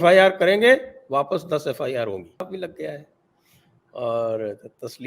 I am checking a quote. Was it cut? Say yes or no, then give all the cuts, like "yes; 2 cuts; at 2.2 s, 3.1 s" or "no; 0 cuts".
yes; 1 cut; at 2.4 s